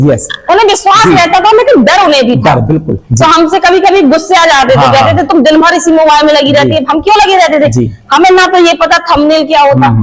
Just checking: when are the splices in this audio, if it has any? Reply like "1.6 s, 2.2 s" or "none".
none